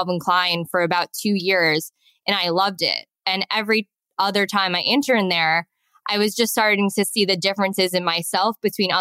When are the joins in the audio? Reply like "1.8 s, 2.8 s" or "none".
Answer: none